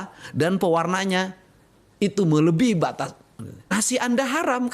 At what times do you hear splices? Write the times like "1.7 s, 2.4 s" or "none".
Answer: 3.7 s